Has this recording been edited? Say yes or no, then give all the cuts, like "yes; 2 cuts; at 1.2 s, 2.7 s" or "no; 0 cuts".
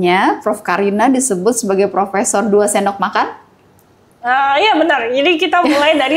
no; 0 cuts